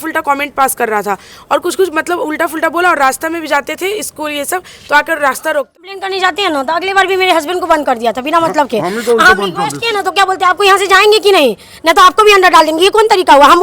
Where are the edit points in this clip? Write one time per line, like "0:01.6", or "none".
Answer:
0:05.7